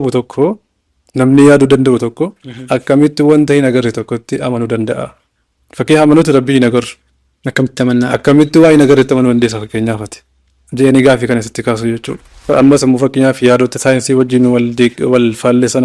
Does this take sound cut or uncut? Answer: cut